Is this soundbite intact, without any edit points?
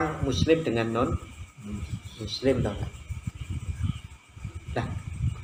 yes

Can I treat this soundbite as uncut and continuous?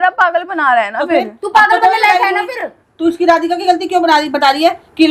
yes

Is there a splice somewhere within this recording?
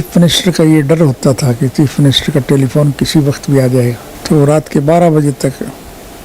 yes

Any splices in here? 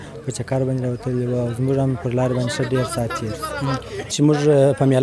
yes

